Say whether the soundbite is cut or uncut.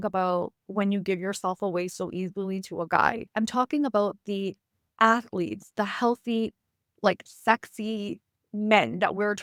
uncut